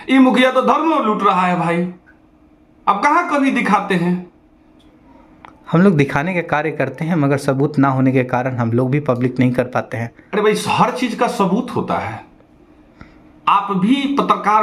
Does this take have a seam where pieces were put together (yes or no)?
no